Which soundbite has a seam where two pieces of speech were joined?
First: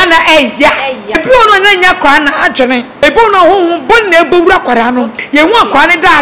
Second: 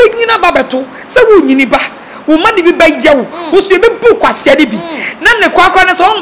first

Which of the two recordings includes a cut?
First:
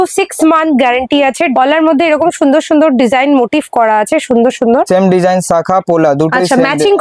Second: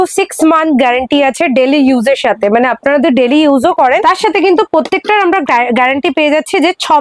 first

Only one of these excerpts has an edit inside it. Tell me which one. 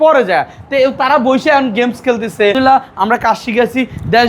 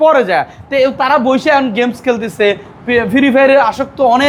first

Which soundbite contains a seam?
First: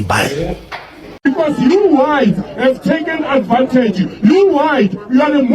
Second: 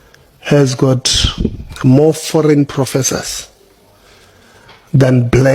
first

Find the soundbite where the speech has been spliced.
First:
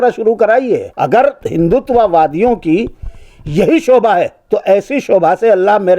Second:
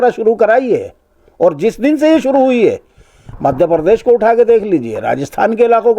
first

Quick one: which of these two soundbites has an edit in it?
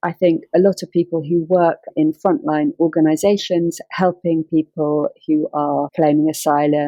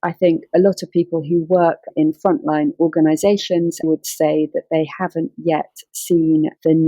second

